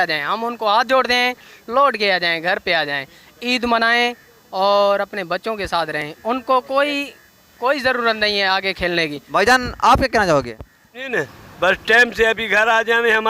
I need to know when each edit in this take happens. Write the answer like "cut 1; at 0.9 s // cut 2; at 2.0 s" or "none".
none